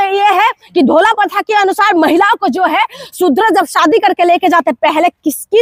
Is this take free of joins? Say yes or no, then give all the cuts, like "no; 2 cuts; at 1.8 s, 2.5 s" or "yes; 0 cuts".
yes; 0 cuts